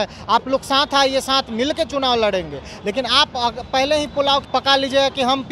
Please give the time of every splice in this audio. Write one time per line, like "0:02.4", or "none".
0:04.4